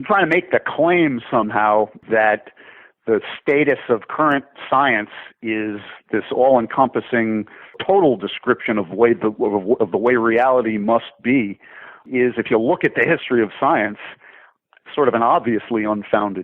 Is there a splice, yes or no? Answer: yes